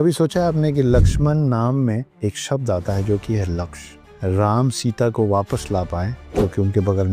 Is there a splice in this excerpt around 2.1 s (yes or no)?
yes